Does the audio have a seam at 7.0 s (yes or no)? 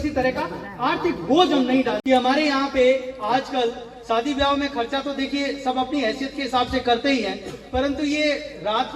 no